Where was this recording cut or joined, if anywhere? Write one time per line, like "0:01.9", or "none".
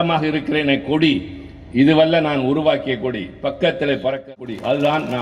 0:04.3